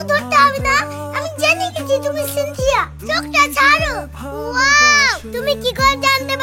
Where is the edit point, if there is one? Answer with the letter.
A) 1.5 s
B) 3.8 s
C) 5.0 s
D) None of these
D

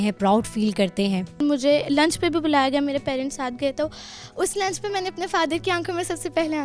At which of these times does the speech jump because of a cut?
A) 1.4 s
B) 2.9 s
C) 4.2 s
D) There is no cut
A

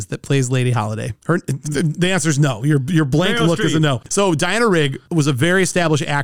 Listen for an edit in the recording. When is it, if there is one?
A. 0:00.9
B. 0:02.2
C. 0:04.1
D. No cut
C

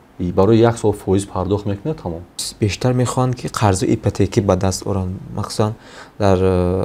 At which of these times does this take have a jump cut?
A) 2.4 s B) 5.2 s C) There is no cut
A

